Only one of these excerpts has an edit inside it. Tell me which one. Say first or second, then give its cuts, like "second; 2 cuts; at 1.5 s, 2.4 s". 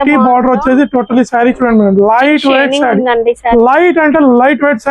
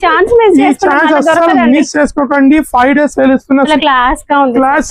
second; 1 cut; at 3.7 s